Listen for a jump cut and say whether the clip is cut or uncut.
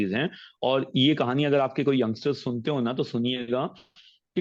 uncut